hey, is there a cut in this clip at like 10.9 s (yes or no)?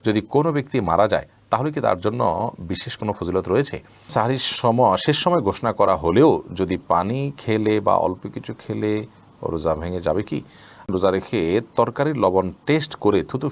yes